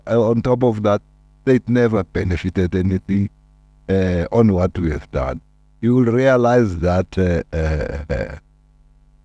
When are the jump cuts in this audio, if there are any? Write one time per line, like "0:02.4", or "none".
0:05.4